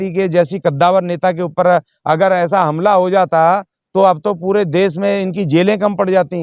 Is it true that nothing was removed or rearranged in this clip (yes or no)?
yes